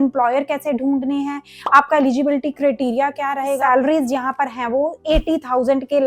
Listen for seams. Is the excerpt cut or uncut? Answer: cut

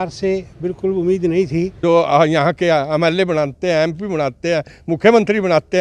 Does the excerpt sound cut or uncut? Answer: cut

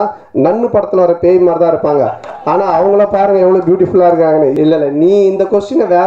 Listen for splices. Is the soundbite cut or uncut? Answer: cut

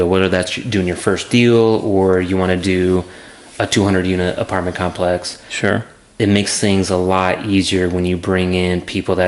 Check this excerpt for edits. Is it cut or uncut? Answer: uncut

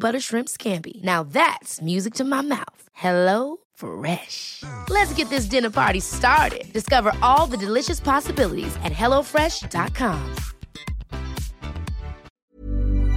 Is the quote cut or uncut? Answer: cut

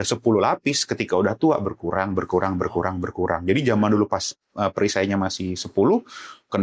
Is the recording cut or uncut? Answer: uncut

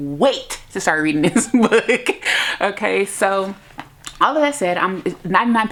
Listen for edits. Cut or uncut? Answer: uncut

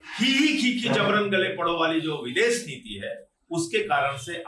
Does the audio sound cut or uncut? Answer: uncut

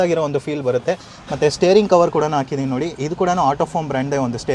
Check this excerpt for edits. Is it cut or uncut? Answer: uncut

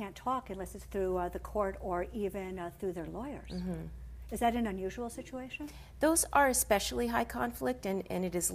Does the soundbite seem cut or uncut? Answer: uncut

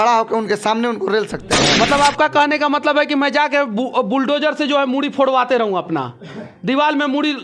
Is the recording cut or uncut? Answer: cut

